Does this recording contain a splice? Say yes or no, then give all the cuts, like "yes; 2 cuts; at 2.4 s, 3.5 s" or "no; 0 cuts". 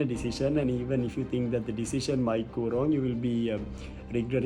no; 0 cuts